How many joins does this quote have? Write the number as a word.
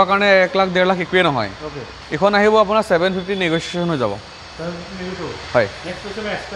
zero